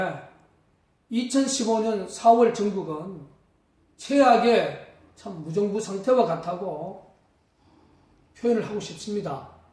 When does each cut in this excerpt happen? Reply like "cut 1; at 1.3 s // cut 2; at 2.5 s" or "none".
none